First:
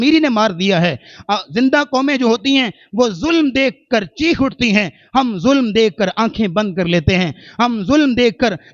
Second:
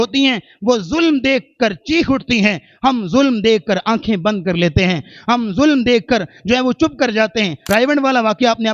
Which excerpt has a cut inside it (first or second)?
second